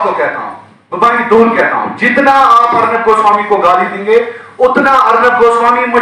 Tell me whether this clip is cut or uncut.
uncut